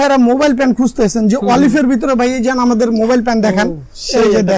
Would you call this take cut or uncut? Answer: uncut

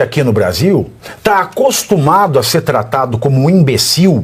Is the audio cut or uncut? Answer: cut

